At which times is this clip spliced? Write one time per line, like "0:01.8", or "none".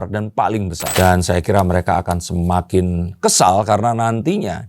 0:00.9